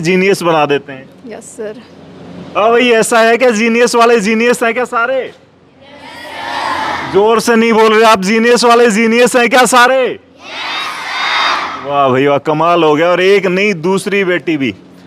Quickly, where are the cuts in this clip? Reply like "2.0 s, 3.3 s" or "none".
none